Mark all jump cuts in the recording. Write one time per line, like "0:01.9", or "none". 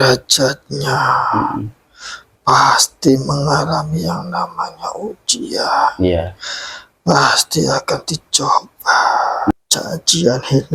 0:09.5